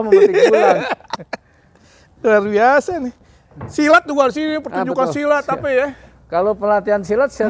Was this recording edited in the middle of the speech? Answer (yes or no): no